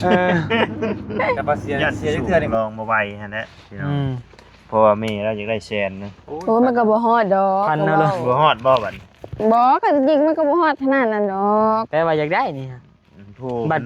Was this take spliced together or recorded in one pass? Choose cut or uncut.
cut